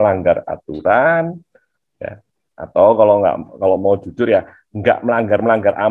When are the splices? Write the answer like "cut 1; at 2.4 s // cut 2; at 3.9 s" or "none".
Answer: none